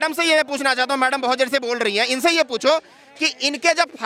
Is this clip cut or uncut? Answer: uncut